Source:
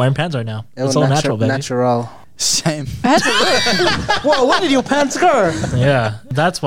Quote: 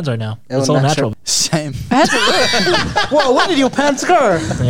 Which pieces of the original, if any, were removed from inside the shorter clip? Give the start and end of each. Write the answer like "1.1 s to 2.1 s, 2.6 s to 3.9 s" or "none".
1.4 s to 2.2 s